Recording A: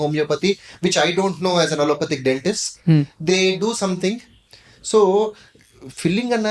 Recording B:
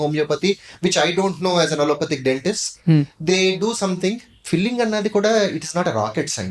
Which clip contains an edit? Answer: B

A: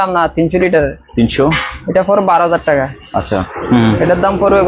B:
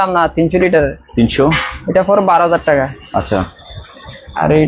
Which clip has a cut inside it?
A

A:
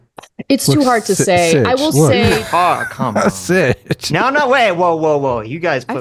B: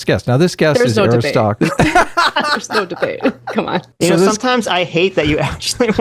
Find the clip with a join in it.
B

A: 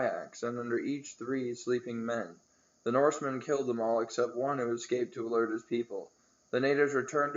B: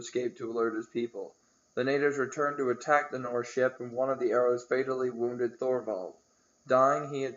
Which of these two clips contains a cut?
B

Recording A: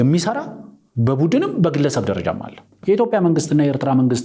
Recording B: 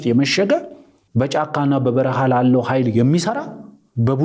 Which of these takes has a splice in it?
A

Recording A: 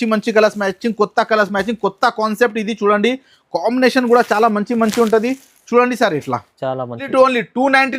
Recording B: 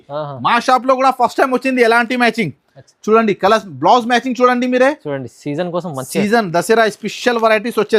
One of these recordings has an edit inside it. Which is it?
A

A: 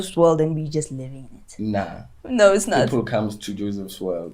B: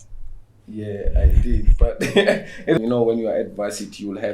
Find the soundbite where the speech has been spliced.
B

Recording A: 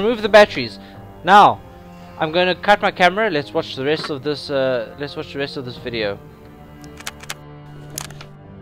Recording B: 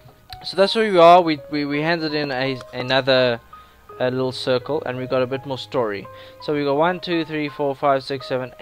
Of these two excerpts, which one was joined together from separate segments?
A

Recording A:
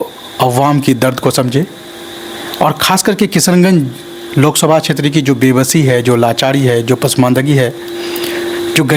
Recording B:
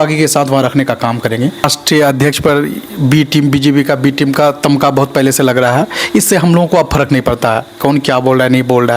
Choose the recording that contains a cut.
B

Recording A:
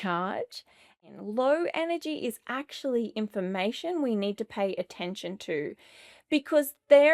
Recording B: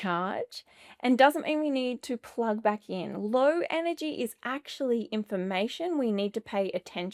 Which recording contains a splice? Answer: A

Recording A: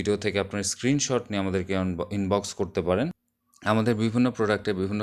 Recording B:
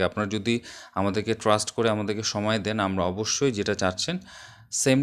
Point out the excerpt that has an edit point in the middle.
A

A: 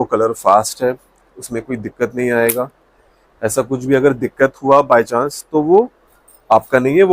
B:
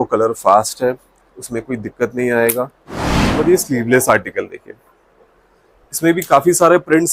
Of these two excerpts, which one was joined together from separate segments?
B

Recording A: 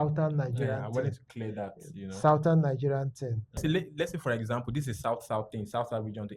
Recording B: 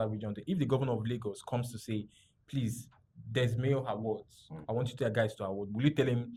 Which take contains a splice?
A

